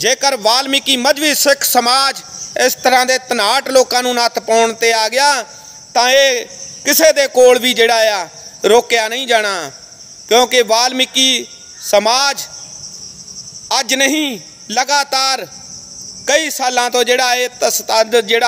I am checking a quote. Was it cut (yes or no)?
no